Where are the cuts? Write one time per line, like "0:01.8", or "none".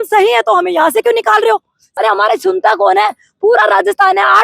0:01.8